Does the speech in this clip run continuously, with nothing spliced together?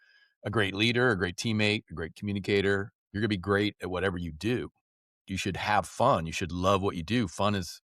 yes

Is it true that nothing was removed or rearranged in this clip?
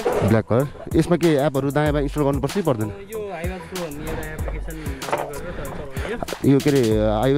yes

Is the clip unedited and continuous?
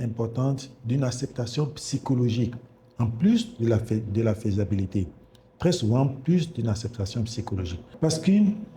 no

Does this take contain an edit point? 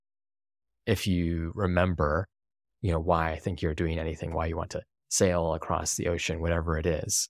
no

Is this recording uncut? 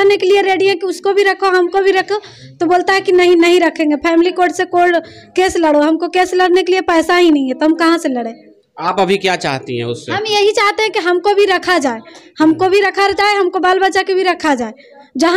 yes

